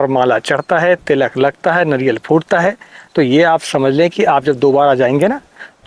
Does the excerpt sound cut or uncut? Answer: uncut